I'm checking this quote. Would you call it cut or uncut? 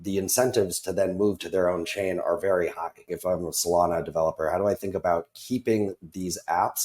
cut